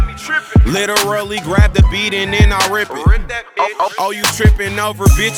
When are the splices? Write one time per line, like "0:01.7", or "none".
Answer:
none

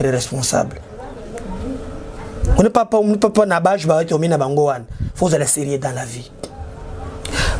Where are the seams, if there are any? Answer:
none

